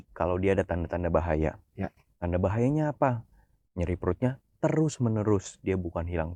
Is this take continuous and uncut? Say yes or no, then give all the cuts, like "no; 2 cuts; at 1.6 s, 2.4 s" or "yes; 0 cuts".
yes; 0 cuts